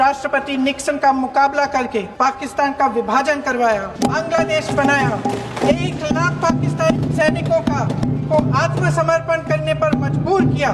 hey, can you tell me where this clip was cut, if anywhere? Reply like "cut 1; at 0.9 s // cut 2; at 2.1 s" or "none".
none